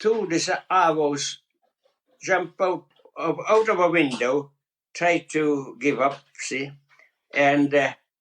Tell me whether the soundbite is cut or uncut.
cut